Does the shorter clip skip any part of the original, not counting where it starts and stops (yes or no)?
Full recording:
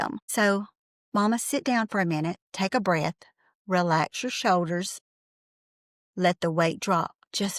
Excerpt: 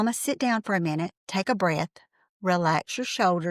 no